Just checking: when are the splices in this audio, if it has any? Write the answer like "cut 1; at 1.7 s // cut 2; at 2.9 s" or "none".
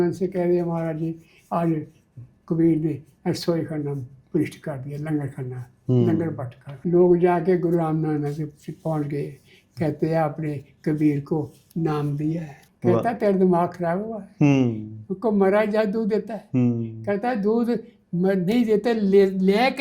cut 1; at 6.8 s // cut 2; at 12.6 s